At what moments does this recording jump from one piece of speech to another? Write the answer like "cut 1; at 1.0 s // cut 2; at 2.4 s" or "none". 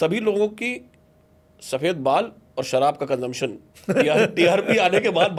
none